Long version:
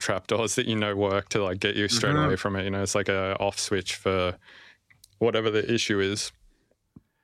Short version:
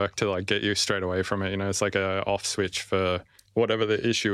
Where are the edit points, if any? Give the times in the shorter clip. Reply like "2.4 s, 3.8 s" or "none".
3.4 s